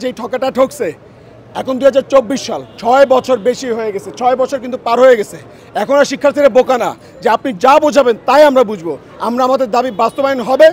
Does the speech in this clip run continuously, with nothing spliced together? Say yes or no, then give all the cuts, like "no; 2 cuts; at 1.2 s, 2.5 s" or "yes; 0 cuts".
yes; 0 cuts